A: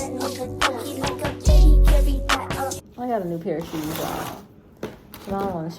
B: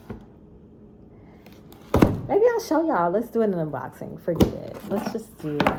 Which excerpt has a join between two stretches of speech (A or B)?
A